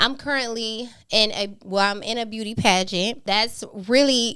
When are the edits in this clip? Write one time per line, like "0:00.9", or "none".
0:03.2

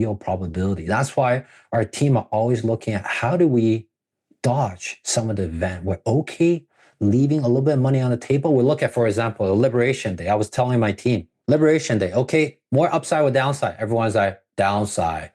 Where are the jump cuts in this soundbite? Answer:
0:11.3

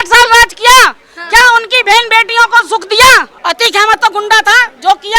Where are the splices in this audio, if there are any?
0:03.3

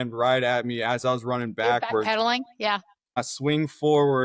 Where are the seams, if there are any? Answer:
0:03.2

